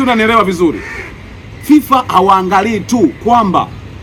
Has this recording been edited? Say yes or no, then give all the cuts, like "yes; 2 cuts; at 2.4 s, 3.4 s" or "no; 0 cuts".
no; 0 cuts